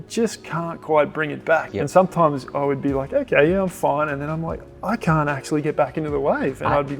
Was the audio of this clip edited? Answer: yes; 1 cut; at 1.7 s

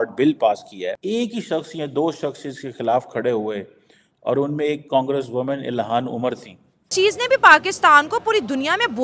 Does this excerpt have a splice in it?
yes; 2 cuts; at 1.0 s, 6.9 s

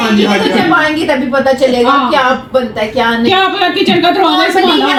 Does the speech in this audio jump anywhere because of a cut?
no; 0 cuts

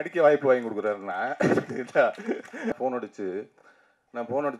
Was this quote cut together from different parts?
yes; 1 cut; at 2.8 s

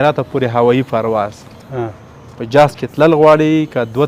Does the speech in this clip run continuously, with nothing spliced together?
yes; 0 cuts

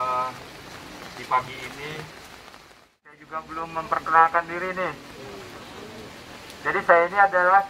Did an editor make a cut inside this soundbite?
yes; 1 cut; at 3.3 s

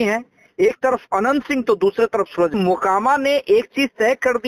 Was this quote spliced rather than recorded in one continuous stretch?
yes; 1 cut; at 2.5 s

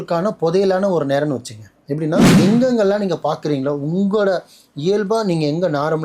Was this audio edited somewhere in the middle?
yes; 1 cut; at 2.3 s

